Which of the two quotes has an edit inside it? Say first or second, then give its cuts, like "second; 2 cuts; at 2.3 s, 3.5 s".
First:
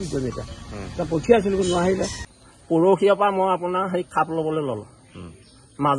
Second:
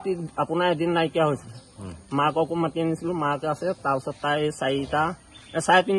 first; 1 cut; at 2.2 s